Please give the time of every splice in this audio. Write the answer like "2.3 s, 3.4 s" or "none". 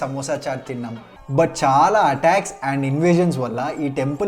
1.1 s